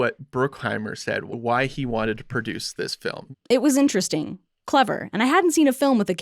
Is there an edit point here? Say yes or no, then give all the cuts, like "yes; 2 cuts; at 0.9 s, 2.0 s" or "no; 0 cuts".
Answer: yes; 1 cut; at 1.2 s